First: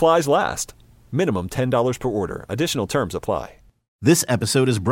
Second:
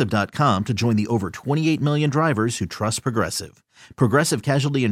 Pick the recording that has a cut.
first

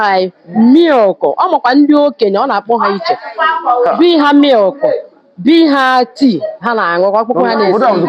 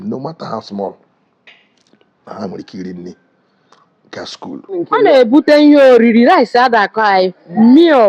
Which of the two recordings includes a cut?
second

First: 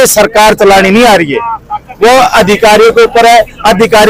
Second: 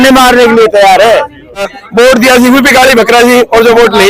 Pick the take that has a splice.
second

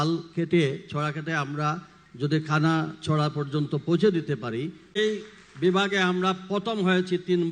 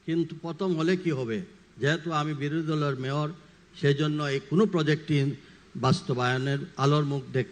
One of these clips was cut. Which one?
first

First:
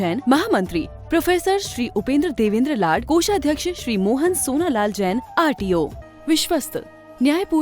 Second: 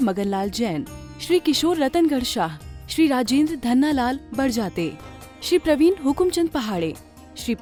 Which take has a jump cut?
first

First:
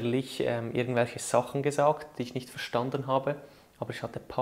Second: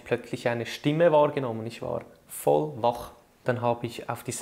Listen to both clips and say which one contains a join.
second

